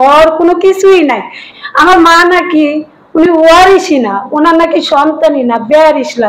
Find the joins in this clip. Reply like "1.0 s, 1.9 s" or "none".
1.5 s